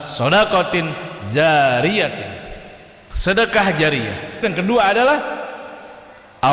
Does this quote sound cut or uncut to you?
cut